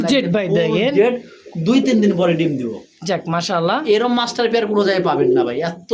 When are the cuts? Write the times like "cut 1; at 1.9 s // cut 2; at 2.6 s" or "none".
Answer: none